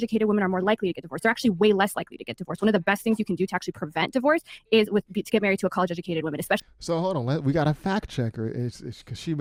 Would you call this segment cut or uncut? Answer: uncut